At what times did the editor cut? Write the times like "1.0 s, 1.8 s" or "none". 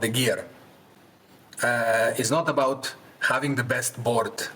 none

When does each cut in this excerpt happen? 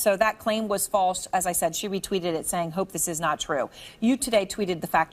3.8 s

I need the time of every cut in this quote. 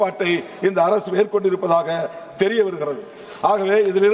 none

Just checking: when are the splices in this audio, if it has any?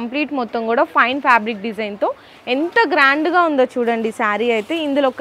none

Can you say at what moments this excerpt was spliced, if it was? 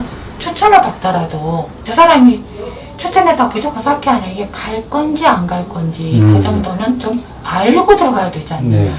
1.8 s, 7.4 s

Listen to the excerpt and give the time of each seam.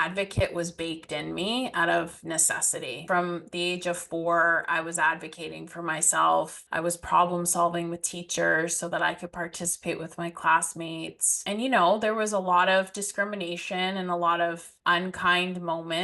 3.0 s, 6.6 s, 11.4 s, 14.7 s

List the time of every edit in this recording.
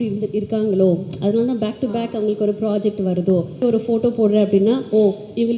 3.6 s

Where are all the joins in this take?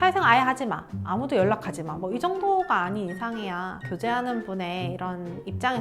none

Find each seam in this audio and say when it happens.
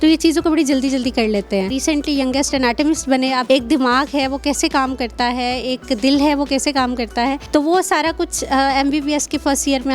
1.8 s, 3.4 s, 7.4 s

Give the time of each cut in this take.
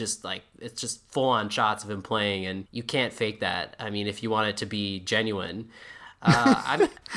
2.7 s

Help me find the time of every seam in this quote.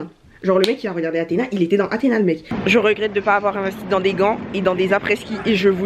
2.5 s

